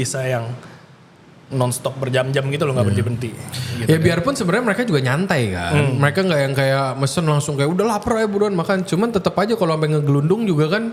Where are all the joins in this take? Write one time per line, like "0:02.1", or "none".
none